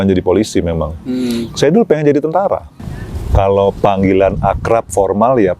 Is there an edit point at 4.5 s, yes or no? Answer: no